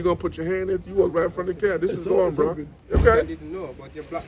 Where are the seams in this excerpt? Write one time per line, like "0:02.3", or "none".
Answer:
0:02.7